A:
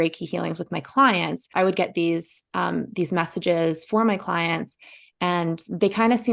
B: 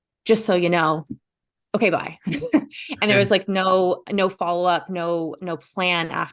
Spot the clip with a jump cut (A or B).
A